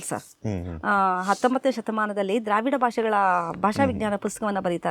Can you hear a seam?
no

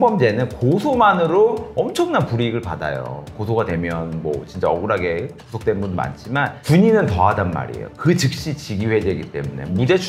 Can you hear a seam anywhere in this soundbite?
no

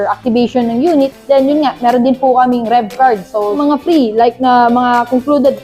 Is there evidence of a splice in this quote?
yes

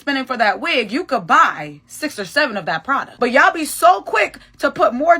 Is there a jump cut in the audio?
yes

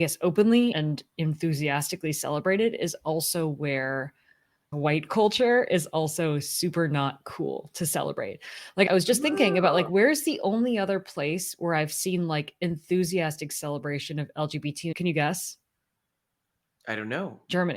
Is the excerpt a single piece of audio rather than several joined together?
no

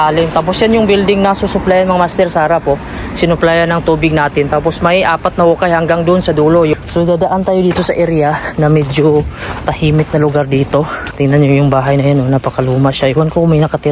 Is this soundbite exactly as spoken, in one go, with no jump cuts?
no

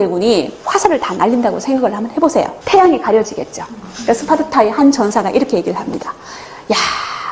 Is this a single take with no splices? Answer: yes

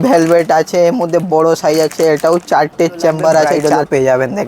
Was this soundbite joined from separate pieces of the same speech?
yes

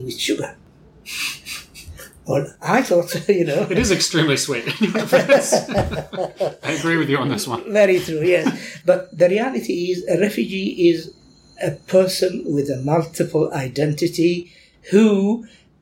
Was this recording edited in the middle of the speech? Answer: yes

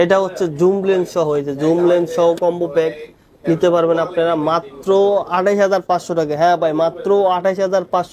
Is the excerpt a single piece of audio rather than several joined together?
yes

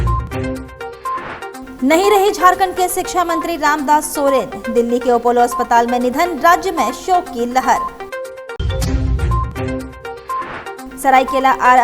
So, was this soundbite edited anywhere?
yes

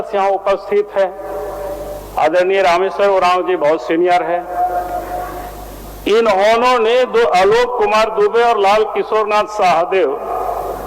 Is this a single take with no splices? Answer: yes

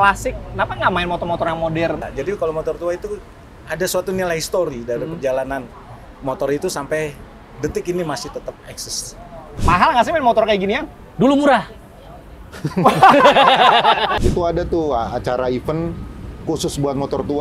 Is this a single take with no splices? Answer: no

